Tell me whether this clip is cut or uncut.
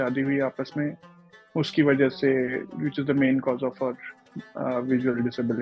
uncut